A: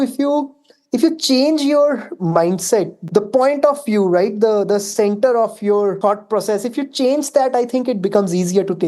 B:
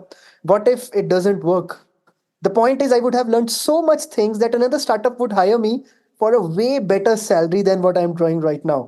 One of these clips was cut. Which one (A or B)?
A